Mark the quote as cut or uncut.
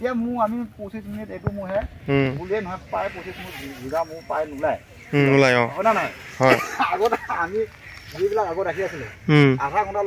uncut